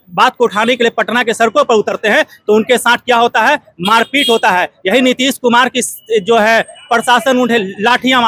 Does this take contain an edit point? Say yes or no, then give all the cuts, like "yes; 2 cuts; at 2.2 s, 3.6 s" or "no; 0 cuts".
no; 0 cuts